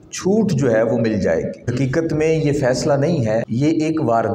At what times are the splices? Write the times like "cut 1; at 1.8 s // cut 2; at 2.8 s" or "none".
cut 1; at 1.7 s // cut 2; at 3.4 s